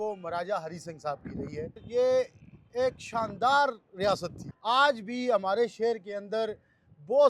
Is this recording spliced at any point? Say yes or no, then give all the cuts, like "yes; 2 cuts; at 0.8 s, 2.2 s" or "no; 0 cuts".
yes; 2 cuts; at 1.8 s, 4.5 s